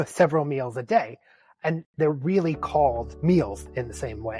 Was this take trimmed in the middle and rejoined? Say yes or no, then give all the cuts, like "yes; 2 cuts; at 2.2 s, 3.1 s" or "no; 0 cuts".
yes; 1 cut; at 3.1 s